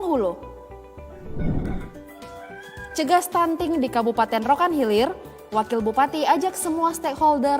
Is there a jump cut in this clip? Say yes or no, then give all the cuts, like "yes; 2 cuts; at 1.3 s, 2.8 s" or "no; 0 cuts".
yes; 1 cut; at 1.7 s